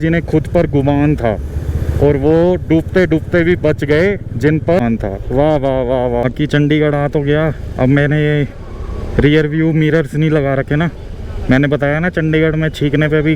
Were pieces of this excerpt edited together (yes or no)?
yes